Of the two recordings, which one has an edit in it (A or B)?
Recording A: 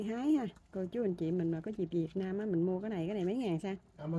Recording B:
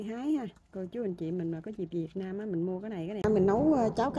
B